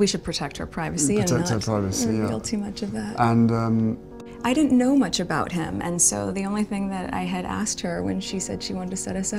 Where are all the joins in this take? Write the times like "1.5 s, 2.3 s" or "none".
4.1 s